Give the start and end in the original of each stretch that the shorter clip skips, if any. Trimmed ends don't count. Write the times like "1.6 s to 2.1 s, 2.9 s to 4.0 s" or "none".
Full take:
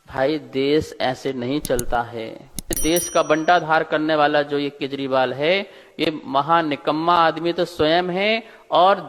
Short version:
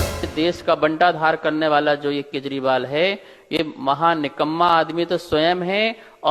none